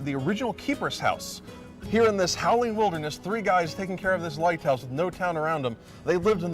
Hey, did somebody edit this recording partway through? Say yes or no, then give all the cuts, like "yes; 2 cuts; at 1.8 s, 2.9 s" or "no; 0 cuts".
yes; 1 cut; at 2.5 s